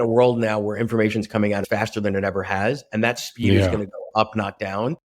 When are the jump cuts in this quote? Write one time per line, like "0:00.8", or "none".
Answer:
0:01.6

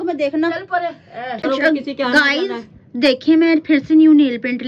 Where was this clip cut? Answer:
0:01.4

